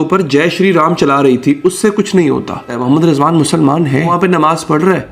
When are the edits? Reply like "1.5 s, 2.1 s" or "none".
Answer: 2.7 s, 4.1 s

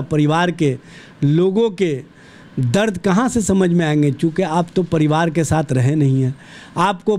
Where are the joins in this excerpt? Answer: none

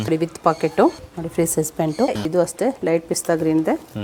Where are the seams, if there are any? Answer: 1.0 s, 2.2 s

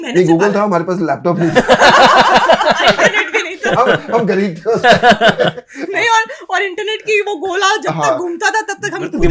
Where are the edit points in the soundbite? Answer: none

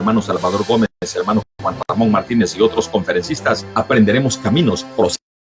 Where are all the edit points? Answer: none

